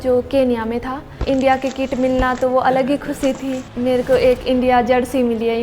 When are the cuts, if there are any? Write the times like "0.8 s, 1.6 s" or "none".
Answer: 1.2 s, 3.6 s